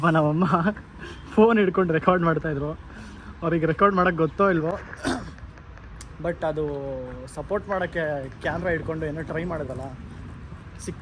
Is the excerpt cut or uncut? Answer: uncut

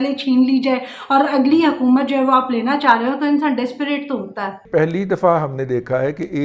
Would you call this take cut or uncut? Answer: cut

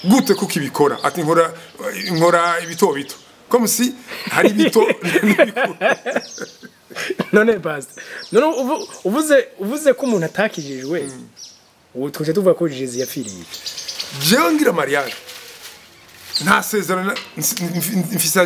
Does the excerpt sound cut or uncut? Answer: cut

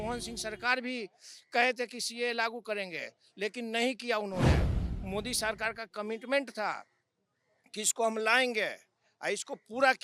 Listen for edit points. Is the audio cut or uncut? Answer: uncut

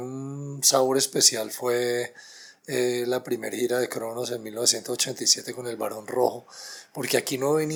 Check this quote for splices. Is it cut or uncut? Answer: uncut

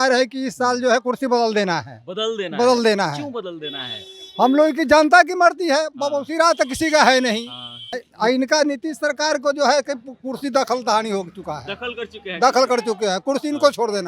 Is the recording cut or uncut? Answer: cut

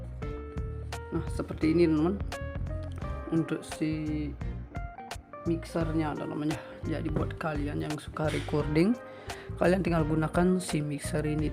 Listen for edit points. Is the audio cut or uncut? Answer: cut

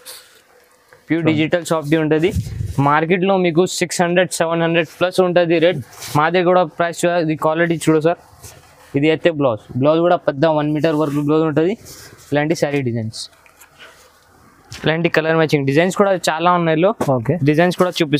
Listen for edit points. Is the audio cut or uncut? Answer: uncut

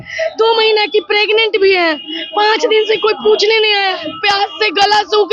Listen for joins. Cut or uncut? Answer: uncut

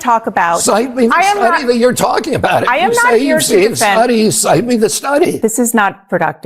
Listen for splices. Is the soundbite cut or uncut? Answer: cut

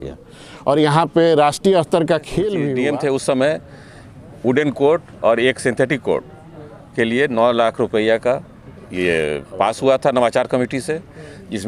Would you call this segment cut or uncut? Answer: cut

